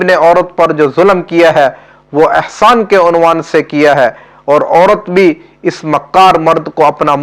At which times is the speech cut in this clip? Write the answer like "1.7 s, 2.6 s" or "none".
none

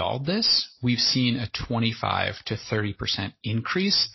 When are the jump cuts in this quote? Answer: none

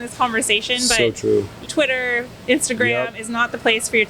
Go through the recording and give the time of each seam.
1.5 s

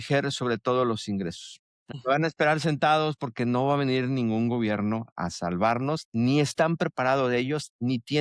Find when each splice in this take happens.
1.9 s

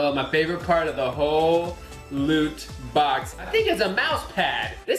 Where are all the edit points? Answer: 3.4 s

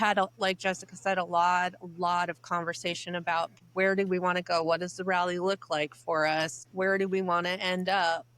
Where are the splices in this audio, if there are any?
3.6 s, 6.6 s

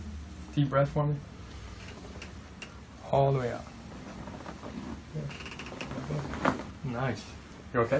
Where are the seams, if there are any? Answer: none

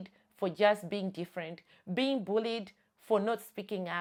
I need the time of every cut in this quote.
none

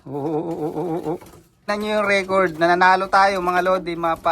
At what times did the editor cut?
1.6 s

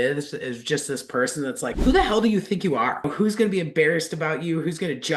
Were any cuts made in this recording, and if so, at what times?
1.8 s, 3.1 s

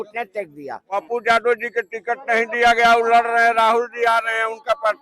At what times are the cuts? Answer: 0.9 s

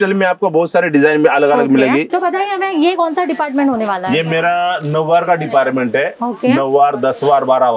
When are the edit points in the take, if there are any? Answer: 2.1 s

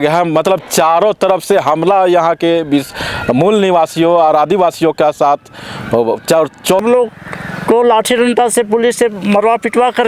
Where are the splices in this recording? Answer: 6.8 s

